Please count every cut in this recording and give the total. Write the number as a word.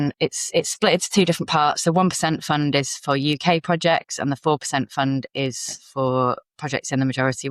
zero